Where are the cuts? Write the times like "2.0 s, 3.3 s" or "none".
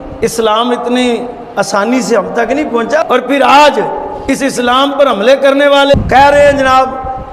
3.0 s, 5.9 s